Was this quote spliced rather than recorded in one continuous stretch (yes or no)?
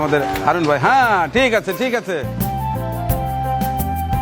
no